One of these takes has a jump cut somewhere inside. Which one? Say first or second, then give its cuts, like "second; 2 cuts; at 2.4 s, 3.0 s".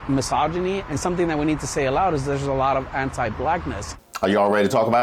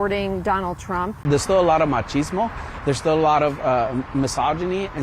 second; 1 cut; at 1.2 s